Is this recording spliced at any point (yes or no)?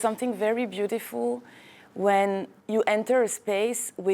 yes